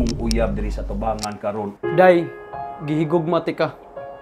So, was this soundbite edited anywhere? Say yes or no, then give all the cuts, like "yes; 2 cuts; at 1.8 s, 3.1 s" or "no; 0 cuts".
yes; 1 cut; at 1.7 s